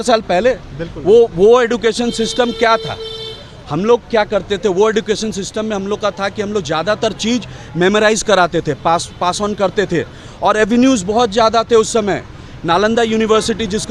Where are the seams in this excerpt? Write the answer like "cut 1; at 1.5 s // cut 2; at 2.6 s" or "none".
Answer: none